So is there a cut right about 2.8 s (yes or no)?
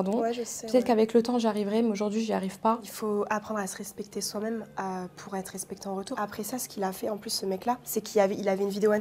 yes